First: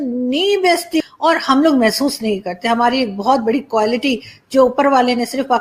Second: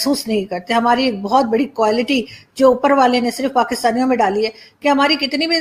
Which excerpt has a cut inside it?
first; 1 cut; at 1.0 s

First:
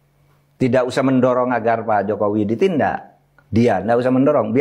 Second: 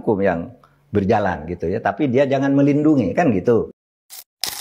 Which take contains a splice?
second; 1 cut; at 3.7 s

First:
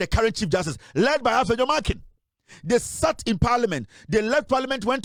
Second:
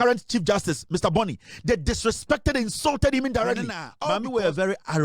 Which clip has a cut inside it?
second; 1 cut; at 3.9 s

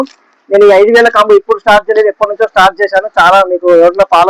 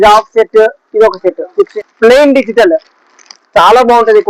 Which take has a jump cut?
second; 1 cut; at 1.4 s

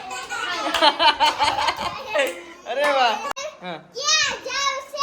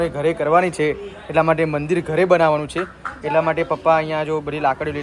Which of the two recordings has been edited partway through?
first; 1 cut; at 3.3 s

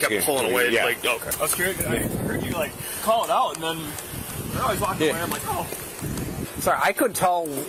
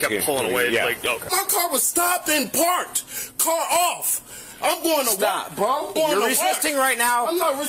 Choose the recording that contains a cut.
second; 2 cuts; at 1.3 s, 5.9 s

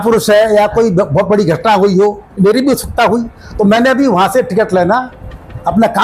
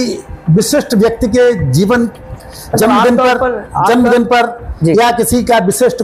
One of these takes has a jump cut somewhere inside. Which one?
first; 1 cut; at 2.4 s

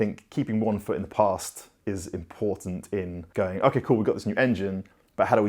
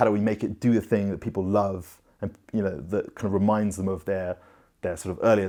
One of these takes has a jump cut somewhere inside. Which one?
first; 1 cut; at 3.2 s

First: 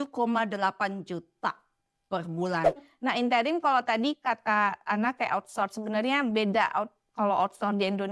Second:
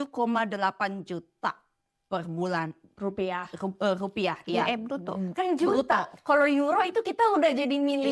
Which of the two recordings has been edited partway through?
first; 1 cut; at 2.8 s

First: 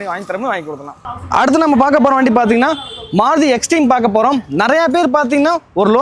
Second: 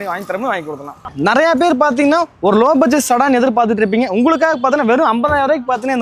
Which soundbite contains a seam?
second; 1 cut; at 1.1 s

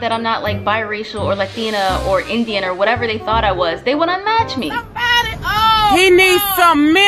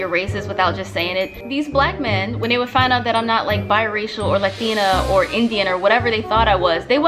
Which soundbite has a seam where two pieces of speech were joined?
second; 1 cut; at 1.4 s

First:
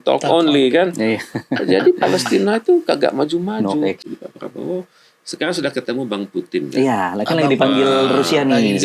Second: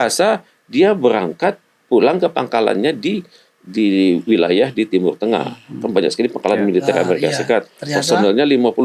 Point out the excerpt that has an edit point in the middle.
first; 1 cut; at 4.0 s

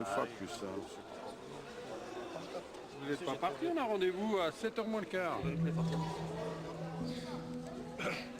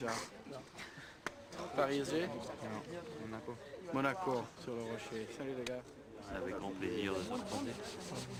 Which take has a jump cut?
first; 1 cut; at 3.0 s

